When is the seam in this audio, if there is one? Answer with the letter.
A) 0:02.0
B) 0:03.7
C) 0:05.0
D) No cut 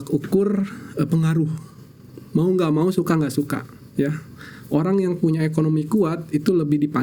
D